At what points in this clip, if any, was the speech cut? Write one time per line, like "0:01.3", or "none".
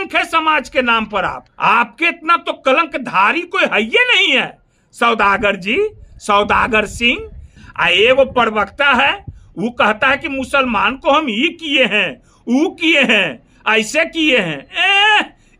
0:01.5
0:07.6